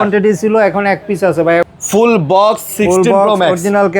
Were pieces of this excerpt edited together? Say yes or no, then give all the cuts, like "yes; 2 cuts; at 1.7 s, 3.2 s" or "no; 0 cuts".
yes; 1 cut; at 1.7 s